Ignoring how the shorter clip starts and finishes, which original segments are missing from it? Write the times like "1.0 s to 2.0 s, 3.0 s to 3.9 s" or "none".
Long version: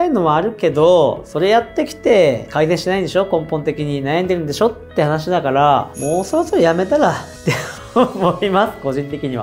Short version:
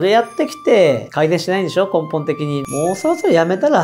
4.0 s to 5.9 s